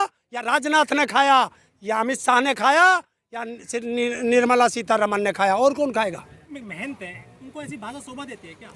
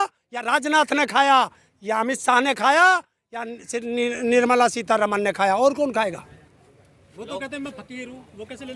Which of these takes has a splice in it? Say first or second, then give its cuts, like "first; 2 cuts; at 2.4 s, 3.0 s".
first; 1 cut; at 6.5 s